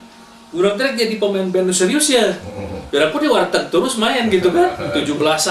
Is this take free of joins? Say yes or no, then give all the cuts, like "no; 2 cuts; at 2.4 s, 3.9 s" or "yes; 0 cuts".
yes; 0 cuts